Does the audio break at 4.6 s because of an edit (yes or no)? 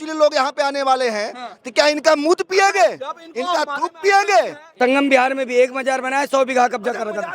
yes